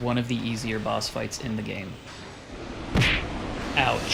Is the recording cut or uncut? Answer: uncut